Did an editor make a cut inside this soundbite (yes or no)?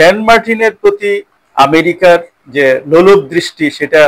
yes